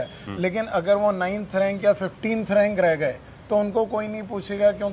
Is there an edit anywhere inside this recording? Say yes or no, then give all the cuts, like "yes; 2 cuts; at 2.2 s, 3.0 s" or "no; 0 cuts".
no; 0 cuts